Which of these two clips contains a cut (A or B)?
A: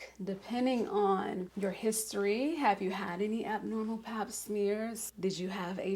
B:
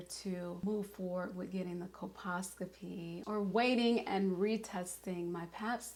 A